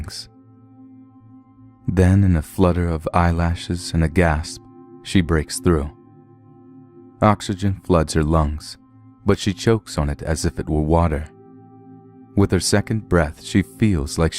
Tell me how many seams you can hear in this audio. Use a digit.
1